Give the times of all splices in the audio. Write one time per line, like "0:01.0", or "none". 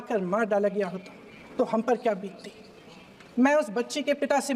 none